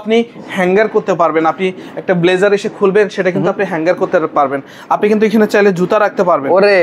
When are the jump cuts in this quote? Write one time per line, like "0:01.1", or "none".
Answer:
none